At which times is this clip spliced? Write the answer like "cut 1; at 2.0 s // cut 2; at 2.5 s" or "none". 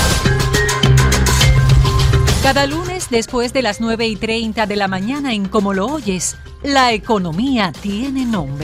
none